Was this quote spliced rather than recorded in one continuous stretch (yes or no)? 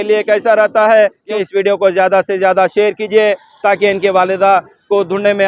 yes